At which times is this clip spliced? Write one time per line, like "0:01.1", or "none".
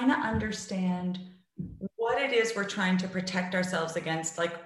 none